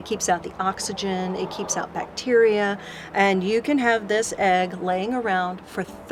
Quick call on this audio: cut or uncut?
uncut